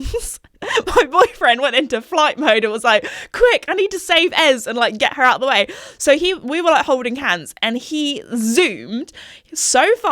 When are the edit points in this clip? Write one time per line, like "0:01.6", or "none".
none